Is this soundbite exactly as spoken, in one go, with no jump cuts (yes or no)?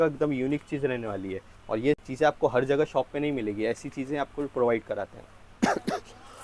yes